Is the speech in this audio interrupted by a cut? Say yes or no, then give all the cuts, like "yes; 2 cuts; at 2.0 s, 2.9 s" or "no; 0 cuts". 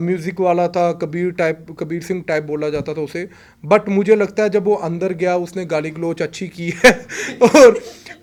no; 0 cuts